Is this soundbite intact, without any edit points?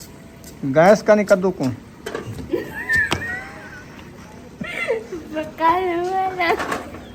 yes; 0 cuts

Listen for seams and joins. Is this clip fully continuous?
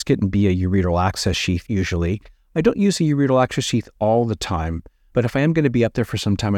no; 1 cut; at 1.6 s

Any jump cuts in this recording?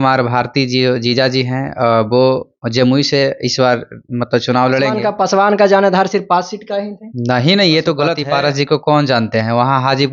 yes; 2 cuts; at 5.0 s, 8.2 s

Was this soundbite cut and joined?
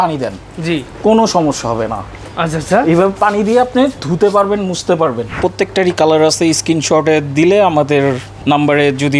yes; 2 cuts; at 5.4 s, 8.3 s

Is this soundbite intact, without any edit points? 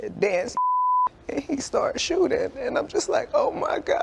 yes; 0 cuts

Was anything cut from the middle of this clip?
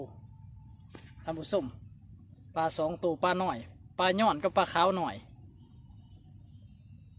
no; 0 cuts

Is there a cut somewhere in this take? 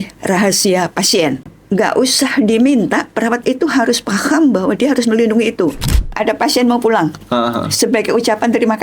yes; 2 cuts; at 1.4 s, 6.1 s

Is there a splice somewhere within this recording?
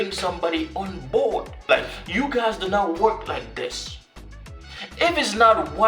yes; 1 cut; at 1.6 s

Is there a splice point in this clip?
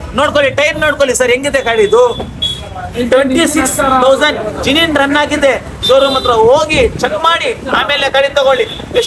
no; 0 cuts

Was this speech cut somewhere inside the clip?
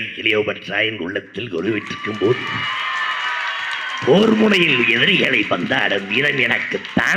no; 0 cuts

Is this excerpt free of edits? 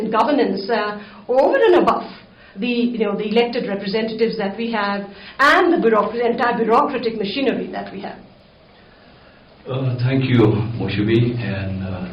yes; 0 cuts

